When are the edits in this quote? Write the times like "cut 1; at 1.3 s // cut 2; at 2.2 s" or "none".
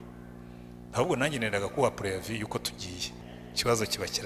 cut 1; at 3.2 s